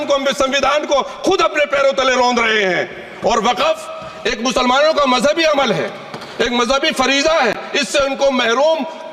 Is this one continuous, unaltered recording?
yes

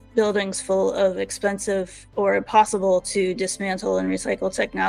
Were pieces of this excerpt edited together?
no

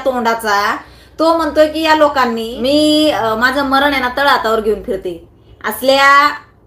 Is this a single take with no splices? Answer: no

